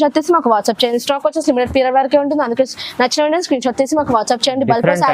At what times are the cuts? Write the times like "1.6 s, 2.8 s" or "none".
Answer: none